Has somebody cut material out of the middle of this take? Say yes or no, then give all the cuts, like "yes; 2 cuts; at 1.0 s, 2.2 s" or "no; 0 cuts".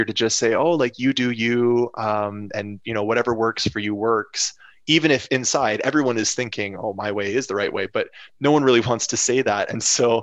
no; 0 cuts